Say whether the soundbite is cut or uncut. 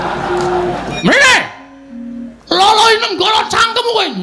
cut